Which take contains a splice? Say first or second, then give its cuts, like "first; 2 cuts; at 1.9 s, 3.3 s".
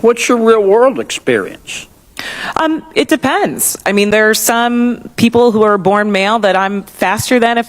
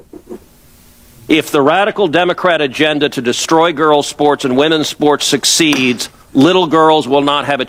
first; 1 cut; at 4.4 s